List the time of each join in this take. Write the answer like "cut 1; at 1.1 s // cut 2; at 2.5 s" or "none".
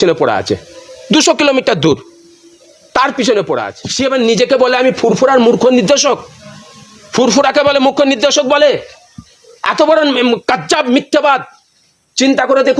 cut 1; at 3.8 s